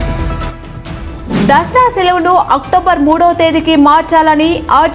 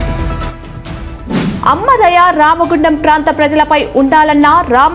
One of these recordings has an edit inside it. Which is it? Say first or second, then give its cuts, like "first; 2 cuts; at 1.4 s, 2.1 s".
second; 1 cut; at 1.0 s